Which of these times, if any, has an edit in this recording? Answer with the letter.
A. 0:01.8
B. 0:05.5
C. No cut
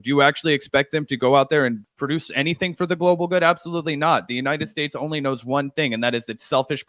A